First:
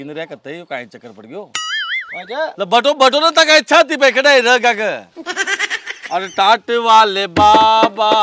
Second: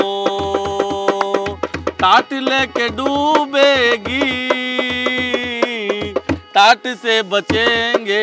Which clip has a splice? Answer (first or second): first